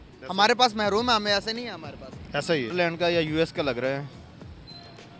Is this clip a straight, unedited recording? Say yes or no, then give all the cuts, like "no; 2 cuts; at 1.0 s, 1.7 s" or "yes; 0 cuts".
no; 1 cut; at 2.7 s